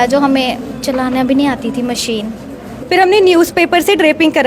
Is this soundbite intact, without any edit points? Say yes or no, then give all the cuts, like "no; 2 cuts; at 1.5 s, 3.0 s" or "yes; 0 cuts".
no; 1 cut; at 2.7 s